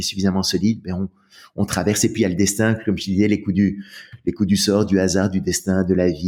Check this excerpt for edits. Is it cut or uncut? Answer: uncut